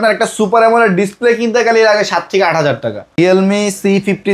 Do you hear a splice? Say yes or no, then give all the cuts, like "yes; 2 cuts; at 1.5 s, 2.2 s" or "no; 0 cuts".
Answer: yes; 1 cut; at 3.1 s